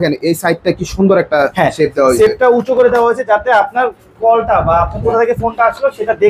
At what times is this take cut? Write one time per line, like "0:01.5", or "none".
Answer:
none